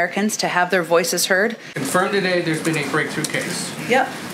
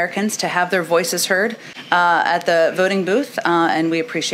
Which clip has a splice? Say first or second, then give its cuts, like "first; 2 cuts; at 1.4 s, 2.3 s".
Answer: first; 1 cut; at 1.7 s